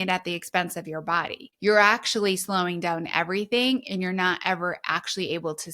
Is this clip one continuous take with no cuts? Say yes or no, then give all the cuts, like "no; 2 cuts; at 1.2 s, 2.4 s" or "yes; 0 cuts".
no; 1 cut; at 1.4 s